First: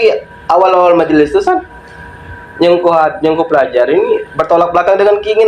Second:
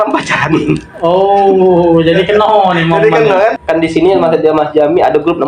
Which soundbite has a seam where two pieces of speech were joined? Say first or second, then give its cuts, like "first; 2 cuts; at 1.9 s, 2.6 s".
second; 1 cut; at 3.6 s